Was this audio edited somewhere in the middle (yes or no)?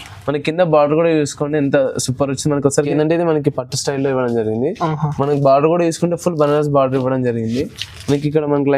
yes